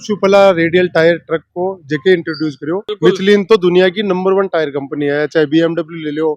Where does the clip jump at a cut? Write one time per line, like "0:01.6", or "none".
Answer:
0:02.9